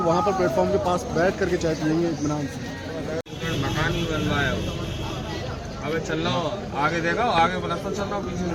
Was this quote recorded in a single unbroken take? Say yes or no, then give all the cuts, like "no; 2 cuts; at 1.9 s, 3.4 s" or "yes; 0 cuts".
yes; 0 cuts